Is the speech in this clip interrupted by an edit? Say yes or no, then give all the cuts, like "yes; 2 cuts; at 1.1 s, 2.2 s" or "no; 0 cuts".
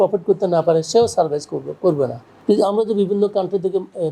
yes; 1 cut; at 2.3 s